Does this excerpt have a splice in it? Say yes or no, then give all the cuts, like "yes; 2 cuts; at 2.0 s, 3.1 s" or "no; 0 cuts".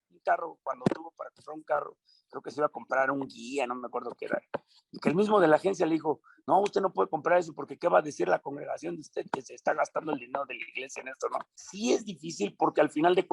yes; 1 cut; at 11.6 s